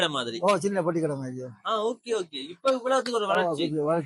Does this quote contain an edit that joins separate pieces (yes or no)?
no